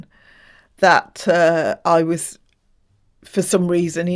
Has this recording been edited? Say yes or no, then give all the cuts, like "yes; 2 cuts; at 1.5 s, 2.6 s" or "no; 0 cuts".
no; 0 cuts